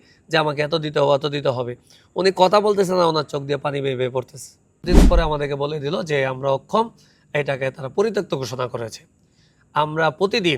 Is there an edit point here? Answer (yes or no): yes